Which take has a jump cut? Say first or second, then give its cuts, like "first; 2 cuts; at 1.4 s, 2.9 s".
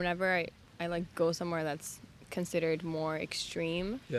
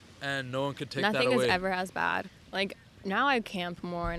second; 1 cut; at 2.4 s